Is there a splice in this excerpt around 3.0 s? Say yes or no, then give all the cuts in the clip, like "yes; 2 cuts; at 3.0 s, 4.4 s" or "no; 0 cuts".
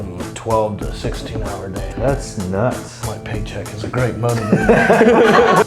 yes; 2 cuts; at 1.8 s, 3.0 s